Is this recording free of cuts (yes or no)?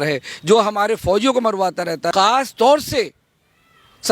no